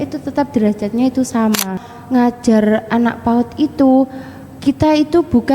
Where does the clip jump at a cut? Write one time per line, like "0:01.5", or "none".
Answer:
0:01.8